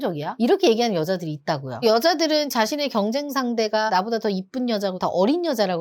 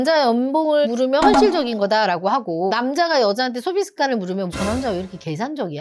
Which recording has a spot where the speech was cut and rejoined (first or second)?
first